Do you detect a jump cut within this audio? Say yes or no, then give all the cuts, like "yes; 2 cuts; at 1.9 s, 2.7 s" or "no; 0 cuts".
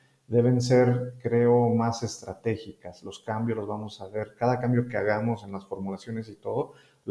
no; 0 cuts